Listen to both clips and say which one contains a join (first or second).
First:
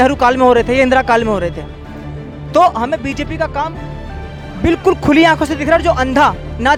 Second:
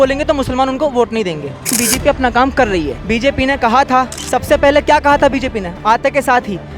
second